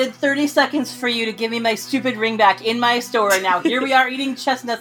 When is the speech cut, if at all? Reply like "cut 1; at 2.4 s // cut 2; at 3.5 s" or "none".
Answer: none